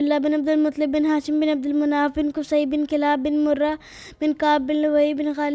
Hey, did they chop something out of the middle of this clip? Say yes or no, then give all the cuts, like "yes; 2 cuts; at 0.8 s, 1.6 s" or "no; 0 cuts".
no; 0 cuts